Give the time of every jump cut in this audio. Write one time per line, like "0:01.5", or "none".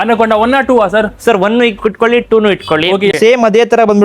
0:03.1